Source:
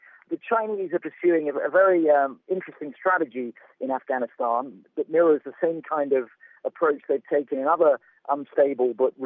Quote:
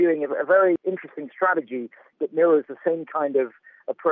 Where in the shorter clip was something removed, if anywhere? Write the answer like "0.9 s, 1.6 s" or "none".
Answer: 0.8 s, 2.0 s